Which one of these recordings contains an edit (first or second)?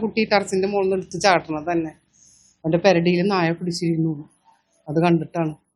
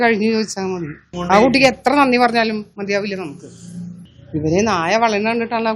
second